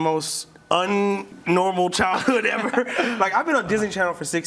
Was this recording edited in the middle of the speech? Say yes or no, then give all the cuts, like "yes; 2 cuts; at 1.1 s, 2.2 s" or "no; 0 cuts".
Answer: no; 0 cuts